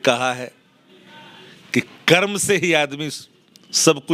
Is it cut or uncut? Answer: uncut